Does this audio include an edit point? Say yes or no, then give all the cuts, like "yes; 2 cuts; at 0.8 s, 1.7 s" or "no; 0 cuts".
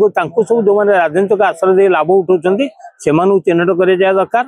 no; 0 cuts